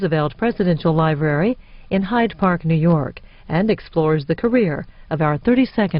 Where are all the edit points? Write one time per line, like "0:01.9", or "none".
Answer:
0:02.0